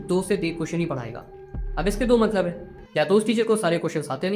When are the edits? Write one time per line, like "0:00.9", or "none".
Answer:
none